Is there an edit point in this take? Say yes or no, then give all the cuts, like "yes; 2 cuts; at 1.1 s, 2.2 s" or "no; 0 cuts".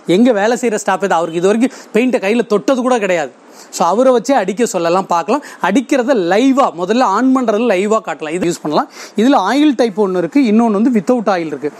yes; 1 cut; at 8.4 s